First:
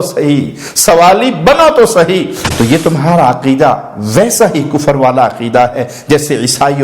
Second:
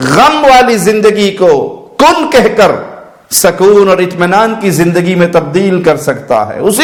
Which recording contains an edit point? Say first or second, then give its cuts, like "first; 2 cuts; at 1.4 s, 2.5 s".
first; 1 cut; at 2.3 s